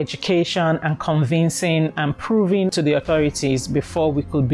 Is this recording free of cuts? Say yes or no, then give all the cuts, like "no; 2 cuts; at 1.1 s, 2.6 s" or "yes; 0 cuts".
yes; 0 cuts